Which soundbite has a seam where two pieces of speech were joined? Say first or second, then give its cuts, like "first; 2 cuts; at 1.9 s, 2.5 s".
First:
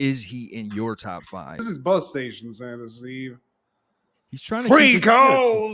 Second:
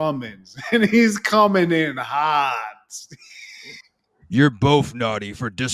first; 1 cut; at 1.6 s